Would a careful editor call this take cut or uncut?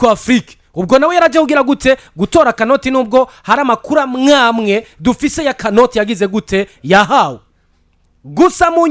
uncut